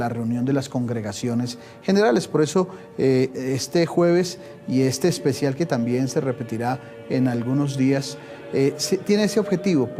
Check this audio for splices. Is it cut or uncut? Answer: uncut